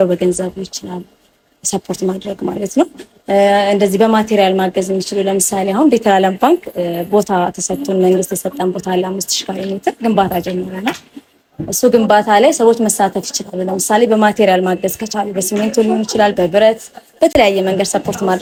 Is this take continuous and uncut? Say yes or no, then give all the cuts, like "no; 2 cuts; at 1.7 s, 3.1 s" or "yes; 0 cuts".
yes; 0 cuts